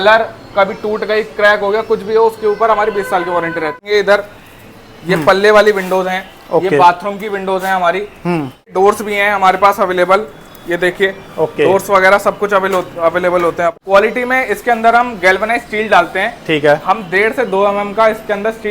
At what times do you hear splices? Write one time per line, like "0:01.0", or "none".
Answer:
0:03.8
0:08.7
0:13.7